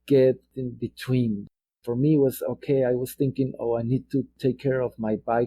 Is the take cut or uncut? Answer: cut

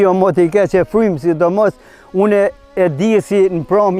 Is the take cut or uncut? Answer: uncut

